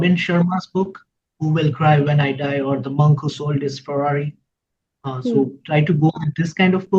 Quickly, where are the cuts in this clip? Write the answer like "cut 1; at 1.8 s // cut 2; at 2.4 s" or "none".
none